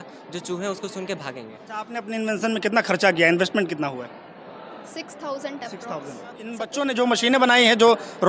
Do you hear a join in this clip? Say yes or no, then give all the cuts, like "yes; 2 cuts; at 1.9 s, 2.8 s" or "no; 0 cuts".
yes; 2 cuts; at 1.9 s, 6.7 s